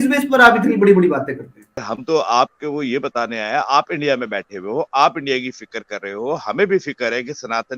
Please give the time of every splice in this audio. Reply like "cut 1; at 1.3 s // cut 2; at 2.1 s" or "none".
cut 1; at 1.9 s